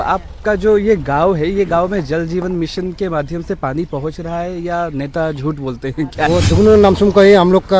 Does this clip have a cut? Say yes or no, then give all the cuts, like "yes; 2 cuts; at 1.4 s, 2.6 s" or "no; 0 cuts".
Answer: yes; 1 cut; at 6.1 s